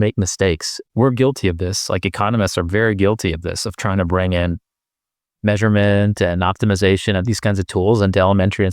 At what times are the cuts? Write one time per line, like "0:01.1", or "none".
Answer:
0:00.9